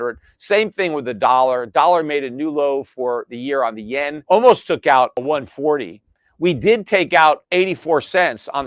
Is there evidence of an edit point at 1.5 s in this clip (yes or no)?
no